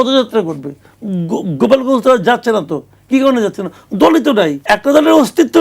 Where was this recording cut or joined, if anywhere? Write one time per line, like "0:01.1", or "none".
0:04.6

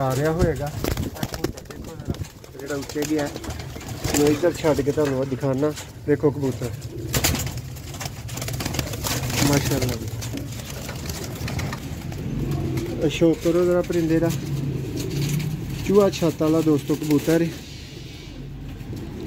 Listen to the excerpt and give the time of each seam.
0:11.8

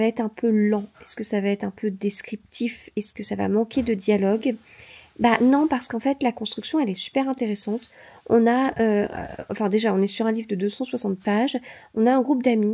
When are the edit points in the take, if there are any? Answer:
none

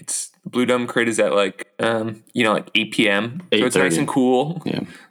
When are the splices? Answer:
0:01.6

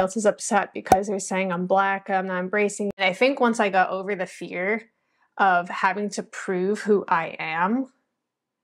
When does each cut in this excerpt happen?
0:02.9

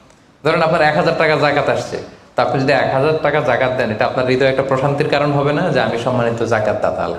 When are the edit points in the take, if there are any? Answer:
none

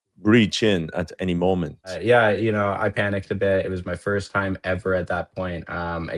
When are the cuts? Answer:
0:02.0

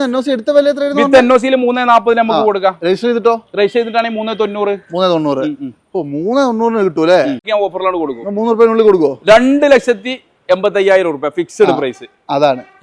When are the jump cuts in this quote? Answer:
0:07.5

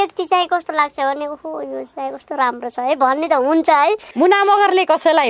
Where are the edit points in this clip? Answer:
0:04.1

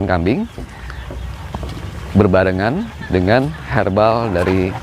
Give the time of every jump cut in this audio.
none

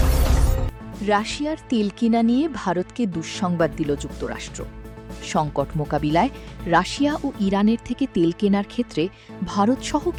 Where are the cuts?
none

